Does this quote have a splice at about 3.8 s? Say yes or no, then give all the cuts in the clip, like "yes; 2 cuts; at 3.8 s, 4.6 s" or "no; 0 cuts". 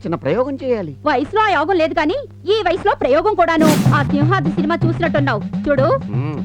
yes; 1 cut; at 3.8 s